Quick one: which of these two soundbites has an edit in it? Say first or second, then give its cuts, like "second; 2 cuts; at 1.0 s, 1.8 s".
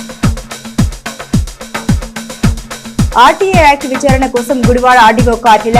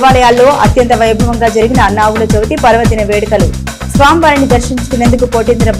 first; 1 cut; at 2.2 s